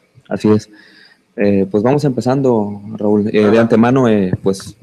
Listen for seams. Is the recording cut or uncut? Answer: cut